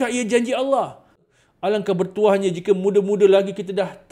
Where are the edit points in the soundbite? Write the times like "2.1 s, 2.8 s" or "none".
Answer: 1.2 s